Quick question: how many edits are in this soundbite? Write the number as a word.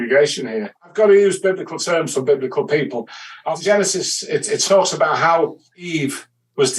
three